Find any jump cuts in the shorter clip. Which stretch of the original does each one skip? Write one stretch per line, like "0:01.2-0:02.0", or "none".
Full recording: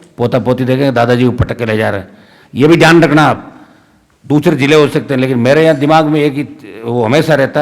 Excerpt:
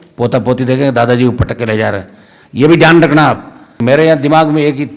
0:03.8-0:05.4